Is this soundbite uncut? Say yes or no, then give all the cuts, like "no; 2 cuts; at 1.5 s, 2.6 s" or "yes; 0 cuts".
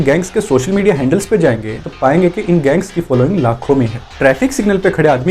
no; 1 cut; at 4.0 s